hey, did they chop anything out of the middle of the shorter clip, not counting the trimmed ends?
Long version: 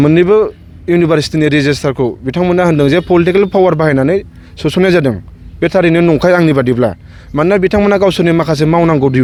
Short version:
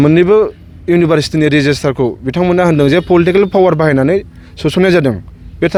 no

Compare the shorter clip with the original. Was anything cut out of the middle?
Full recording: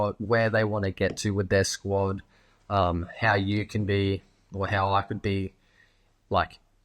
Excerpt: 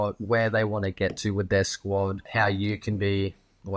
yes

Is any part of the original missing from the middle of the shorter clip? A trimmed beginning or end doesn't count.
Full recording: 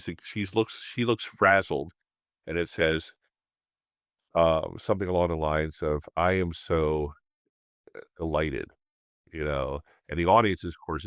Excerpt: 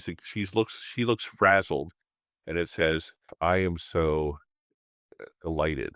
yes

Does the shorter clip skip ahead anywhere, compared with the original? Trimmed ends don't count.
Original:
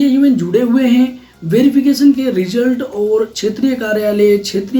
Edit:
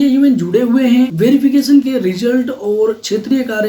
yes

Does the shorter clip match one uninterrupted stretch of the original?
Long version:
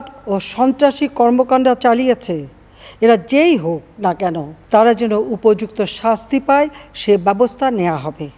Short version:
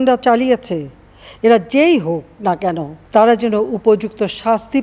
yes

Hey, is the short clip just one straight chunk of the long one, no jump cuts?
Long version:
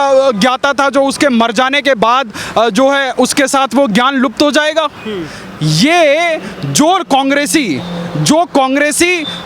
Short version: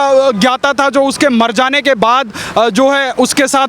yes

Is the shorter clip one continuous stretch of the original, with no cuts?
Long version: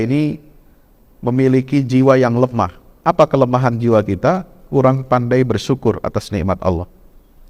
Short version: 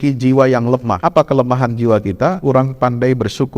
no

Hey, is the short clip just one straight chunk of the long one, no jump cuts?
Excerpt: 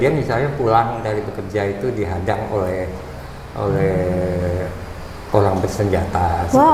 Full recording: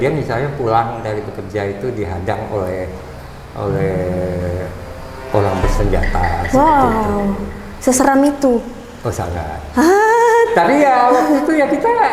yes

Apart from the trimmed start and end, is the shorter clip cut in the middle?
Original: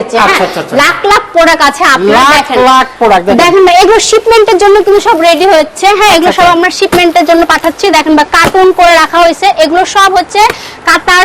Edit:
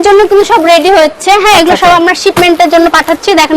no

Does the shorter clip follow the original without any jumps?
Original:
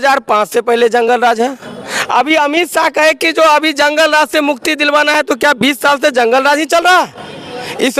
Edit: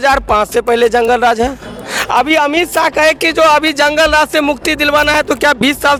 yes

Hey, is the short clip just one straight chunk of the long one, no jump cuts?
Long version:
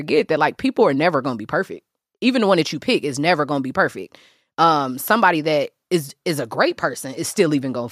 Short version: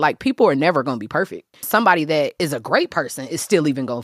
no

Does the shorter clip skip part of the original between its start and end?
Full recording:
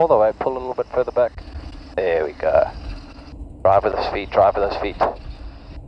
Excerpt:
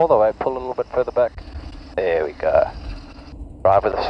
no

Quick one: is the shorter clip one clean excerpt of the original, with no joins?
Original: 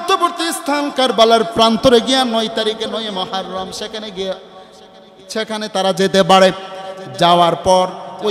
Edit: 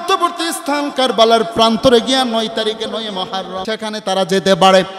no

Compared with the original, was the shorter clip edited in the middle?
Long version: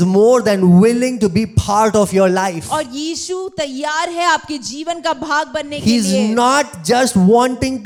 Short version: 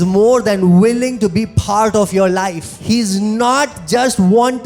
yes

